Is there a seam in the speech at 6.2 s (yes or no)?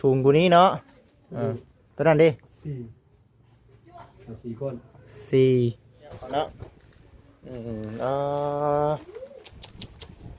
yes